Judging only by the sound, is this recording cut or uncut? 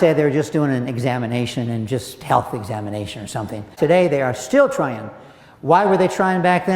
cut